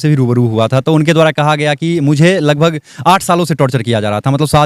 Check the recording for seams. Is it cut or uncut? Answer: uncut